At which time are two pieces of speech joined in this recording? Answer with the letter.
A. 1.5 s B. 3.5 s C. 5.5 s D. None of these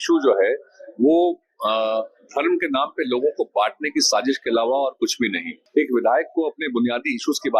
C